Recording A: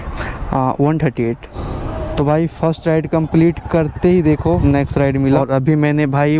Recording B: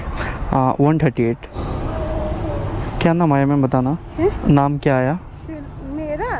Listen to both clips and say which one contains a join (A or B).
A